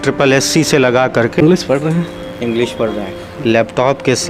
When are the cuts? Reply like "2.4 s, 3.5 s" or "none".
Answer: 1.4 s